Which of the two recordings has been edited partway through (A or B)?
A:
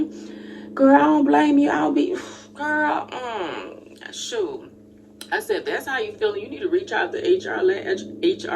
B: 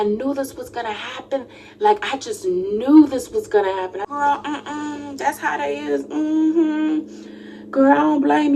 B